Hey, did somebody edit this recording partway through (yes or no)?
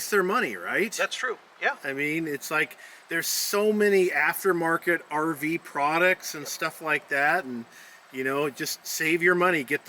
no